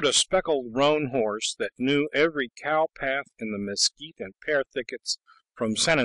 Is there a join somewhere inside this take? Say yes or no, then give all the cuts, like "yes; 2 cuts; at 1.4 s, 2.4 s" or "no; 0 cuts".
yes; 1 cut; at 5.0 s